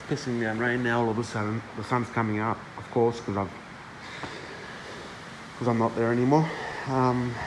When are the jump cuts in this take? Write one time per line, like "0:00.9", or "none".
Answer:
none